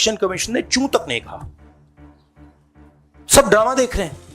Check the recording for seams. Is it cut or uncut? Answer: cut